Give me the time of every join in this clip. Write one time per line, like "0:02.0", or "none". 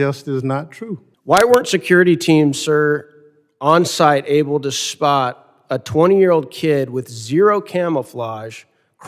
0:01.1